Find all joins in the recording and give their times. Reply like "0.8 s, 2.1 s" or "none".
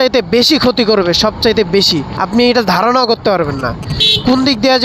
2.1 s